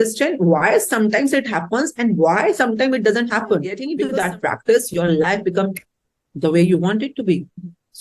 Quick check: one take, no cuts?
no; 1 cut; at 3.9 s

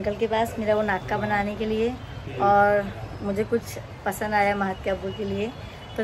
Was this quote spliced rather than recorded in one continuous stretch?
no; 0 cuts

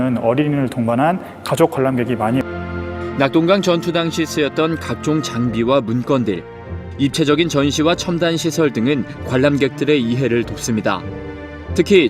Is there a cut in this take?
yes; 1 cut; at 1.9 s

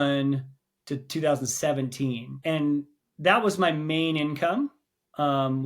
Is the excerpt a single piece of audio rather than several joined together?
no; 1 cut; at 2.3 s

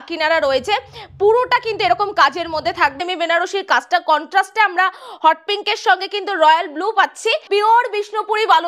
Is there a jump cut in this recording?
yes; 2 cuts; at 3.0 s, 7.5 s

